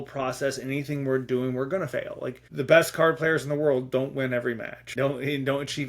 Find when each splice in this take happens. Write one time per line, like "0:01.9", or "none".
0:02.4
0:04.9

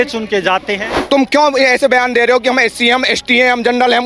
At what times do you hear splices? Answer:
0:00.9

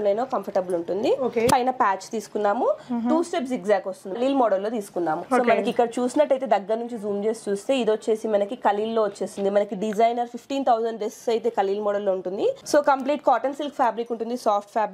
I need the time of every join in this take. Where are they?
0:01.5
0:04.2
0:05.2
0:12.6

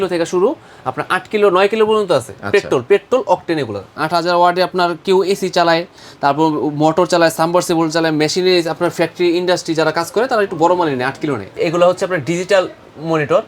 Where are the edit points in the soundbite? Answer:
0:02.4
0:03.9
0:11.5

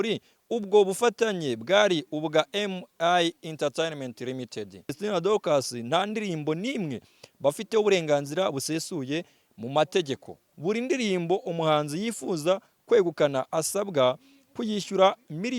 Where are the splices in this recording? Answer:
0:05.0
0:10.5

